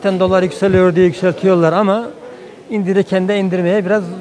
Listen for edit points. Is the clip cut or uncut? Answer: uncut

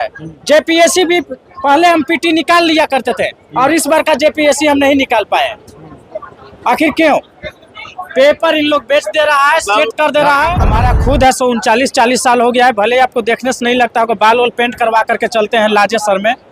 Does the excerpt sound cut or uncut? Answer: cut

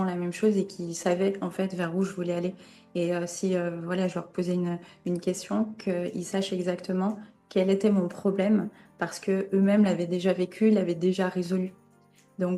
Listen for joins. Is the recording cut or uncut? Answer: uncut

